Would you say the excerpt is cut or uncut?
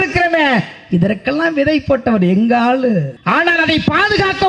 cut